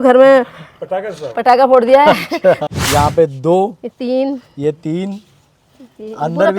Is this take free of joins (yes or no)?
no